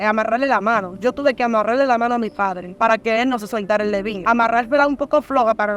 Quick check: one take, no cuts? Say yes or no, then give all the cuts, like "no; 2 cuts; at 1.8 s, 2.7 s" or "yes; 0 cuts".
no; 2 cuts; at 2.6 s, 4.1 s